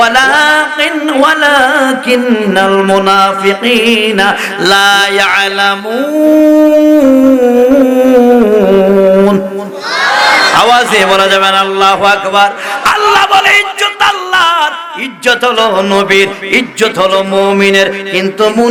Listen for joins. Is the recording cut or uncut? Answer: uncut